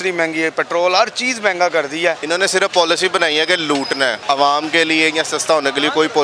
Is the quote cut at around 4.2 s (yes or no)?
yes